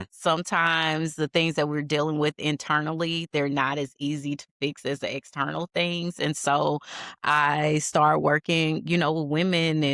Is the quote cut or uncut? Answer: uncut